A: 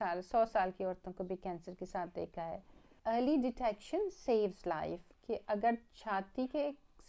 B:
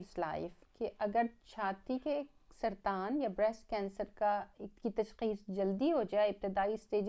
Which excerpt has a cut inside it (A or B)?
A